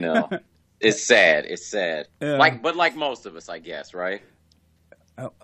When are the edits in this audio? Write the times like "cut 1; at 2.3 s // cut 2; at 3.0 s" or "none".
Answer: cut 1; at 2.3 s